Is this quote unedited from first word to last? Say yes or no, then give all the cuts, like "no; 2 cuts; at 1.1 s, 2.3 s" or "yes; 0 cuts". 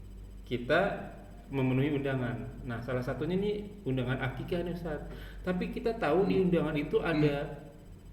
yes; 0 cuts